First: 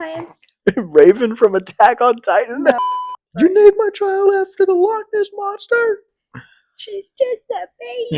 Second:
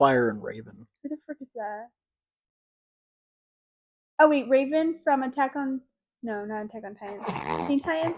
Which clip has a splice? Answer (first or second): first